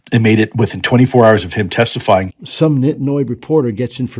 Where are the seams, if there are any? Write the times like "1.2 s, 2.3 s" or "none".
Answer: 2.4 s